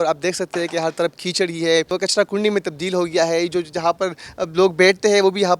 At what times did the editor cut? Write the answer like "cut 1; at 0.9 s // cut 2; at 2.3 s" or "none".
cut 1; at 1.9 s